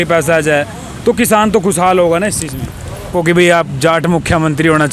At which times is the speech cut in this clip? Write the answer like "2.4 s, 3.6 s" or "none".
3.1 s